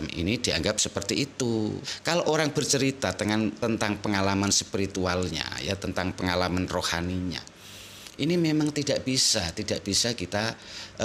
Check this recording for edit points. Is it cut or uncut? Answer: cut